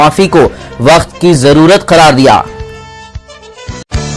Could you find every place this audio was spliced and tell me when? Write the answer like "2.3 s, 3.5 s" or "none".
none